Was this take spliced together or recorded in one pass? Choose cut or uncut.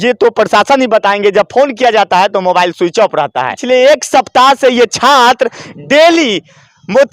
cut